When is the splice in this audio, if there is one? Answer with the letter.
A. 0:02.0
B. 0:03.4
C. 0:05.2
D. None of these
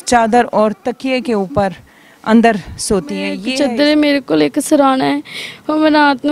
B